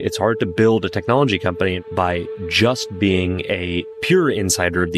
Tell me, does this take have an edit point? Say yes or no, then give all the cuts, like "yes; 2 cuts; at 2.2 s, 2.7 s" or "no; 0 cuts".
yes; 1 cut; at 1.8 s